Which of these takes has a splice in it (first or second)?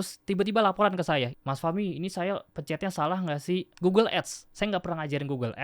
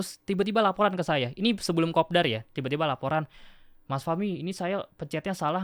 first